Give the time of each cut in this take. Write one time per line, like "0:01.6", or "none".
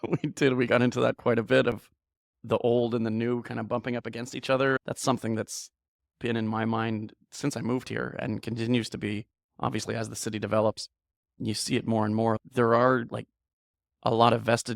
0:04.8